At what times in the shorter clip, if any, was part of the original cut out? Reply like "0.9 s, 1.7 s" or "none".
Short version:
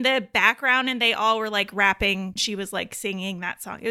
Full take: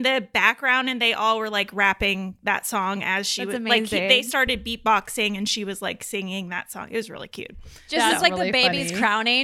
2.4 s